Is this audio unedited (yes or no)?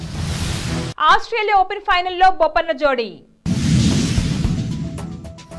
yes